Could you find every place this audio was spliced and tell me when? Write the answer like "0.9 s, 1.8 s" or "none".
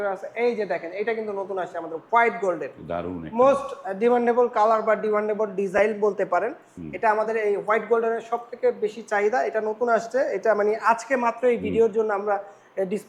none